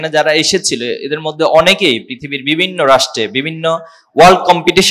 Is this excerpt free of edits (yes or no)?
yes